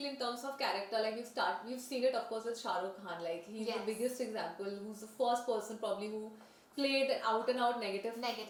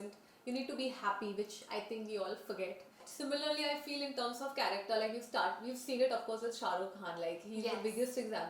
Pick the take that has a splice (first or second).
second